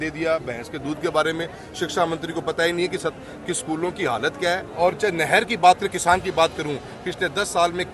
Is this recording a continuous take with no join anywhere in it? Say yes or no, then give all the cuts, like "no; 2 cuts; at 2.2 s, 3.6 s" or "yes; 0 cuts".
no; 1 cut; at 4.7 s